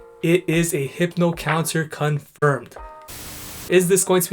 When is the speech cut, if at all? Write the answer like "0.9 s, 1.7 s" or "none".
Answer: 3.2 s